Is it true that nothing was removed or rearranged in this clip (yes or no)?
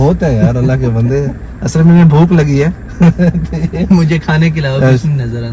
yes